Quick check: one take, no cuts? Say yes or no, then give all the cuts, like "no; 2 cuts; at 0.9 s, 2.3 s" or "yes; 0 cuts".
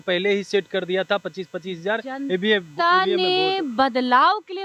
yes; 0 cuts